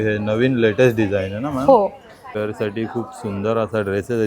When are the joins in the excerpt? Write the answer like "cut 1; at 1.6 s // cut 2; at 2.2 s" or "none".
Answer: cut 1; at 2.3 s